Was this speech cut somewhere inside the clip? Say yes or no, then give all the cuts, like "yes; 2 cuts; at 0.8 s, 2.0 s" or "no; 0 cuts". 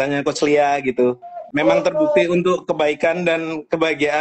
yes; 1 cut; at 1.4 s